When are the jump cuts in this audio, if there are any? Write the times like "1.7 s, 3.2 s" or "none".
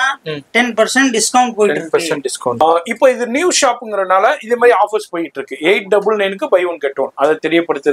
2.6 s